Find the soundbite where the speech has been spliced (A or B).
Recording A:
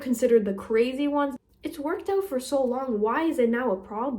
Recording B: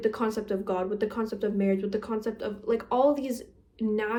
A